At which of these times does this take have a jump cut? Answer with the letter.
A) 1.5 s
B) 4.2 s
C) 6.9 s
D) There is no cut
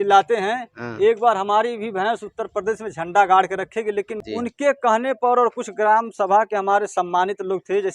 B